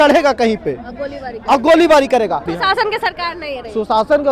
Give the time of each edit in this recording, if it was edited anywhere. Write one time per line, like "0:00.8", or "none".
0:02.5